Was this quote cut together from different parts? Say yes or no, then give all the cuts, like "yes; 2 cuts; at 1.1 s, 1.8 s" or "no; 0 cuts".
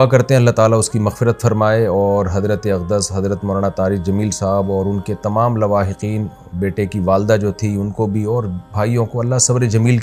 no; 0 cuts